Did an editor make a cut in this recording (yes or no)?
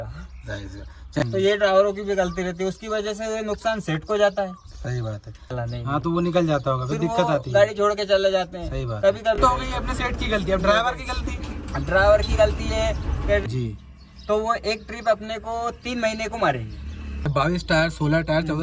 yes